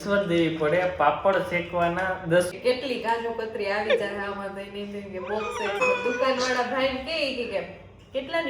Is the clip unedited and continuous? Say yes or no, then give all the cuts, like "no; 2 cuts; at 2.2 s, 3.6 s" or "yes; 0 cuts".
no; 2 cuts; at 2.5 s, 5.8 s